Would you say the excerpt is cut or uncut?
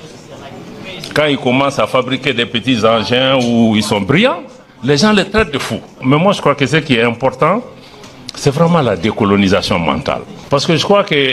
cut